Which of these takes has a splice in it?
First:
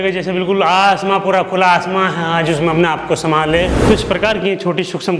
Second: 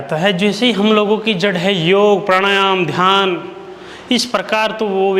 first; 1 cut; at 3.8 s

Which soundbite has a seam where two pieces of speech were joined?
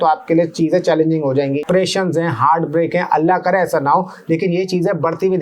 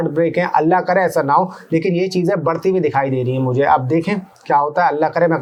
first; 1 cut; at 1.6 s

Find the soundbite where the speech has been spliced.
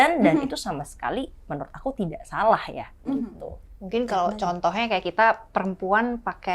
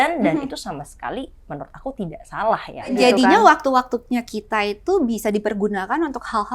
second; 1 cut; at 3.0 s

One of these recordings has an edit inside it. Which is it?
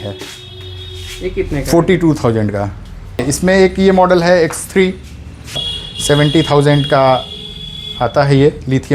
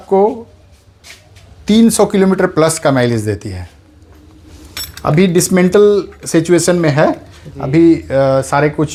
first; 2 cuts; at 3.2 s, 5.7 s

